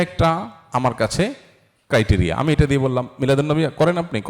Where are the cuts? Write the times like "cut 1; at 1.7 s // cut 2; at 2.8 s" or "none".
none